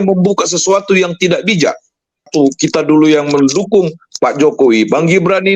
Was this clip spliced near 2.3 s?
yes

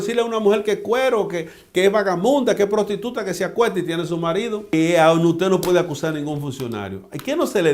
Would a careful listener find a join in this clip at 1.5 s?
no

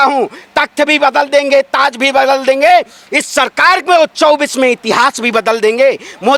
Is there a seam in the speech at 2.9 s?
no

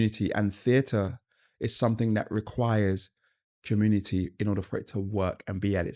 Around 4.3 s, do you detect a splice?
no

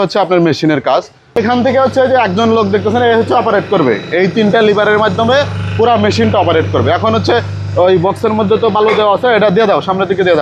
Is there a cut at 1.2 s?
no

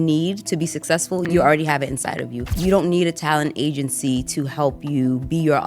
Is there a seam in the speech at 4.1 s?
no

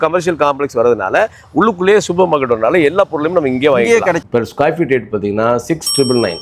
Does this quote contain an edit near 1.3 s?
no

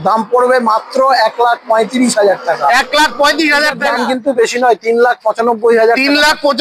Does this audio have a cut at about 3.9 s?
yes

